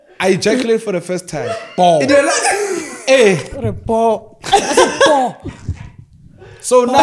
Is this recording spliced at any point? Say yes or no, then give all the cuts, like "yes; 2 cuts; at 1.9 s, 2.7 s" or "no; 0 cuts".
no; 0 cuts